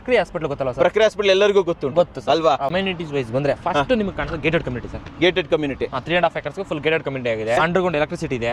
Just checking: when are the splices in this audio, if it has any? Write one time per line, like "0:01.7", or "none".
0:02.7
0:07.6